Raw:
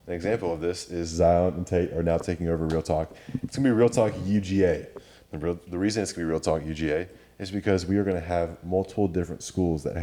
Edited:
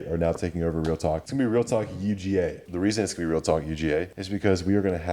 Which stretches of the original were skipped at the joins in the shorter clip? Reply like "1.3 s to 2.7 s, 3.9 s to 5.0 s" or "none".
3.1 s to 3.5 s, 4.9 s to 5.6 s, 7.2 s to 7.4 s